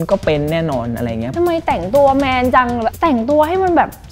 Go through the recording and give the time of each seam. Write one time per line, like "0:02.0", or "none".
0:01.2
0:02.9